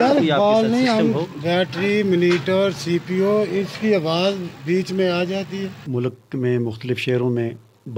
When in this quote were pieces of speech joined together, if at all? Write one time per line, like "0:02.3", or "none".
0:05.8